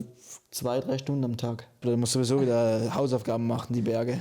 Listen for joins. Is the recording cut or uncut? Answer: cut